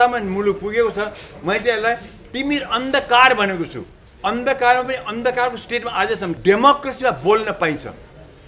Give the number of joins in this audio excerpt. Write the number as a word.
one